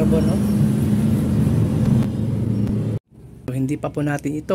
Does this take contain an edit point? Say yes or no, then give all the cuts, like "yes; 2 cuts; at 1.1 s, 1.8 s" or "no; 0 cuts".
yes; 1 cut; at 3.5 s